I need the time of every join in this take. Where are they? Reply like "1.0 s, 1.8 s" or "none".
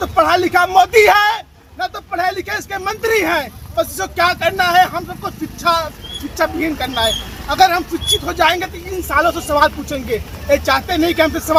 none